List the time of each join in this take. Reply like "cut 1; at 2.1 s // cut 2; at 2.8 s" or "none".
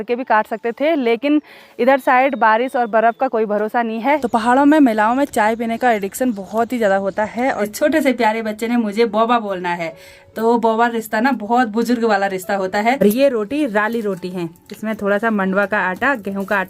cut 1; at 4.2 s // cut 2; at 7.7 s // cut 3; at 13.0 s